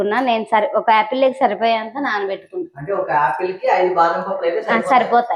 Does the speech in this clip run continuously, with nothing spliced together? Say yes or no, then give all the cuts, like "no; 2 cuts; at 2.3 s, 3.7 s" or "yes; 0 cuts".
yes; 0 cuts